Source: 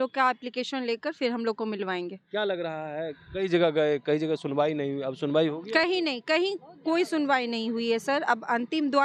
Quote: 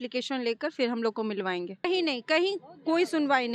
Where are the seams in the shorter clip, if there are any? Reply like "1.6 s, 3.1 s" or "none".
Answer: 1.9 s